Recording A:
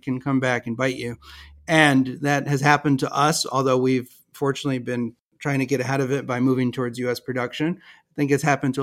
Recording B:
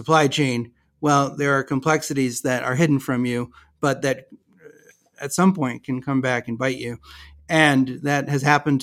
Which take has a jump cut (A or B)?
A